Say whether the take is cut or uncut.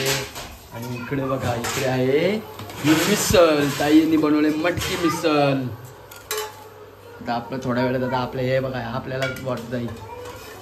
uncut